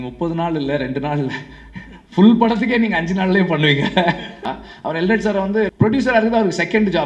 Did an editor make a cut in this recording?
yes; 2 cuts; at 4.5 s, 5.7 s

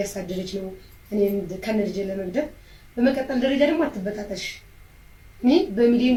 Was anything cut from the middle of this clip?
no; 0 cuts

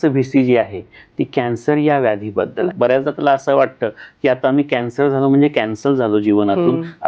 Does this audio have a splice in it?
yes; 1 cut; at 2.7 s

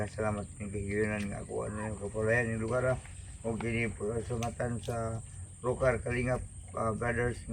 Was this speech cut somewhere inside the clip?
no; 0 cuts

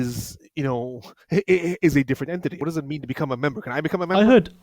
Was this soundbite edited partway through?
yes; 1 cut; at 2.6 s

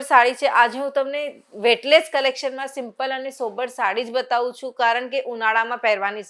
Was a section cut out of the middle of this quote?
no; 0 cuts

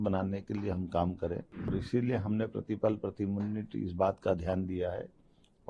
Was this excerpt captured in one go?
no; 1 cut; at 1.7 s

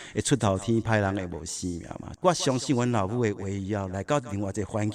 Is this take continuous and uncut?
no; 1 cut; at 2.1 s

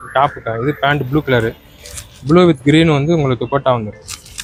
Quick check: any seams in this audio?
no; 0 cuts

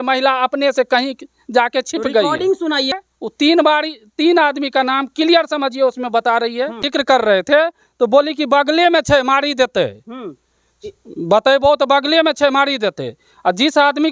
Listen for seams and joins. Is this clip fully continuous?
no; 2 cuts; at 3.0 s, 6.8 s

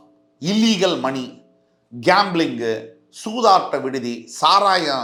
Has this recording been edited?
no; 0 cuts

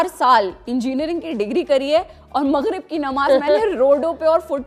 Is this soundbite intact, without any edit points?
yes; 0 cuts

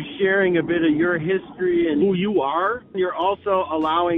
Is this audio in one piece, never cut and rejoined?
no; 1 cut; at 2.9 s

